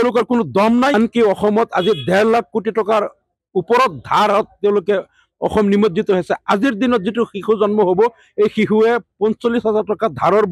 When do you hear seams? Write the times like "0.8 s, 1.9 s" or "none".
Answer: 0.9 s

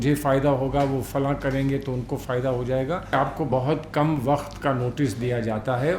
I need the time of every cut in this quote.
3.1 s

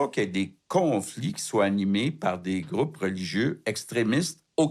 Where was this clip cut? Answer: none

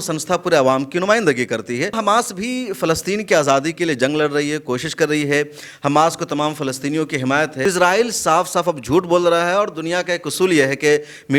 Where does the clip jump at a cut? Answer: 2.0 s, 7.6 s

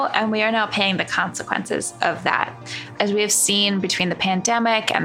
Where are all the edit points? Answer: 2.9 s

